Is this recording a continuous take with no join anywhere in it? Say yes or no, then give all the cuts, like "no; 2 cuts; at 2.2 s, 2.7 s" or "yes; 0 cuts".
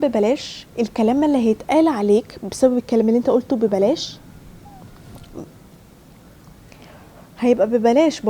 yes; 0 cuts